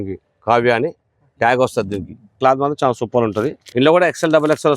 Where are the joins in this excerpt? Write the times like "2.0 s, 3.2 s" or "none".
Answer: 2.4 s, 3.6 s